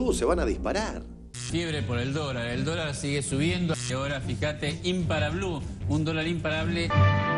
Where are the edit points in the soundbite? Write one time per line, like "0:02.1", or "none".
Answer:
0:01.3